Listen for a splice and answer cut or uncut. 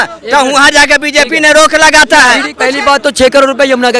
cut